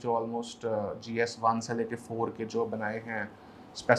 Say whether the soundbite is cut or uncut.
uncut